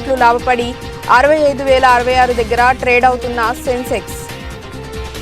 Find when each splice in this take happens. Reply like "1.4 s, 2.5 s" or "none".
4.0 s